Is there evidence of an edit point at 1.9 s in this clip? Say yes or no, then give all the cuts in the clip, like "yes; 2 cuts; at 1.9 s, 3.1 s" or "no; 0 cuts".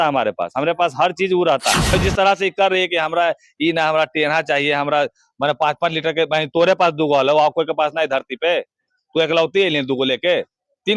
yes; 1 cut; at 1.9 s